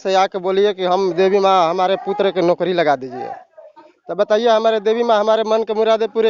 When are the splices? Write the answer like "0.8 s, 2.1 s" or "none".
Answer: none